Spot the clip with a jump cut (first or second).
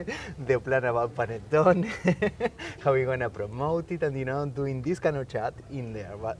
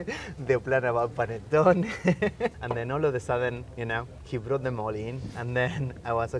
second